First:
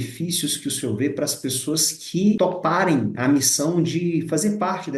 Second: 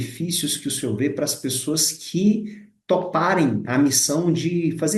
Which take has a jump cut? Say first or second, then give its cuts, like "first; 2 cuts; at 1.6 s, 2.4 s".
first; 1 cut; at 2.4 s